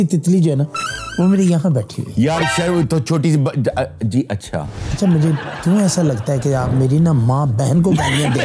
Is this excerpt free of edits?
yes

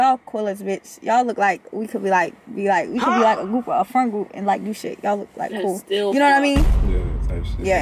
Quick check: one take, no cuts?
yes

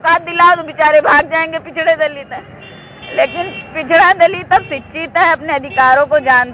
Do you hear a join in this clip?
no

